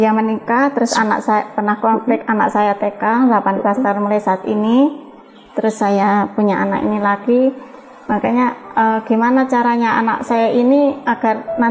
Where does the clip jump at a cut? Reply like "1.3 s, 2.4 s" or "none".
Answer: none